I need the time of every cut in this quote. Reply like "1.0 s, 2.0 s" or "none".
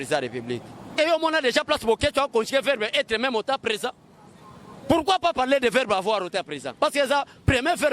1.0 s